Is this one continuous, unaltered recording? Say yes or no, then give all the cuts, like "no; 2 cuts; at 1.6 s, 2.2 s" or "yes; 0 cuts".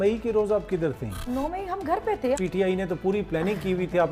no; 2 cuts; at 1.3 s, 2.4 s